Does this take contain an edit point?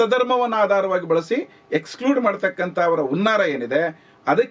no; 0 cuts

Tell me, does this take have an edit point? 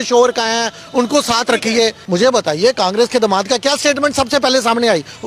yes; 1 cut; at 2.0 s

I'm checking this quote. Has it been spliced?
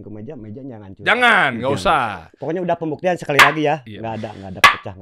no; 0 cuts

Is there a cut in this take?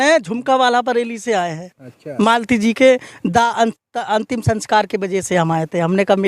no; 0 cuts

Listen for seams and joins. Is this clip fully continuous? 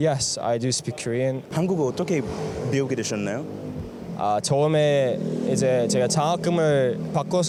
yes; 0 cuts

